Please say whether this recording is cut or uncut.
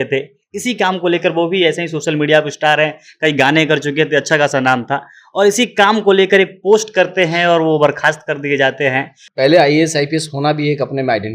cut